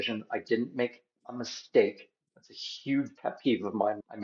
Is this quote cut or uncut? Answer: uncut